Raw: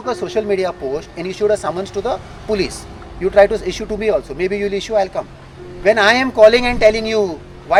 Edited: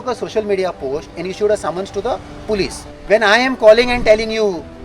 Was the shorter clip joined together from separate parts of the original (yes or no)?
yes